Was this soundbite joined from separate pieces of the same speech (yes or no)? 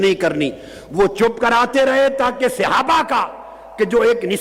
no